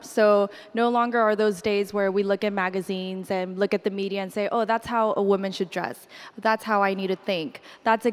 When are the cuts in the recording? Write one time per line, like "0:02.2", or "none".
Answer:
none